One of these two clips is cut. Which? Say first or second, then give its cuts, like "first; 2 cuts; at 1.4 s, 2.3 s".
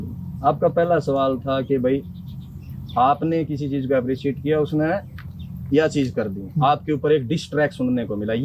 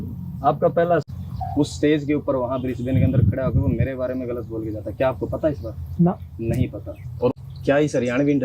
second; 2 cuts; at 1.0 s, 7.4 s